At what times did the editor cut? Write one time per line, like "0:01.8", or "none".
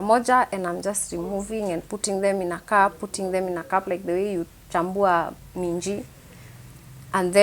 none